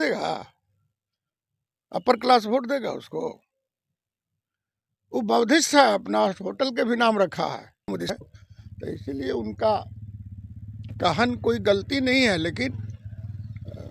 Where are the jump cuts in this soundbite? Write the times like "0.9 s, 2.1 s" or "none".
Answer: 8.0 s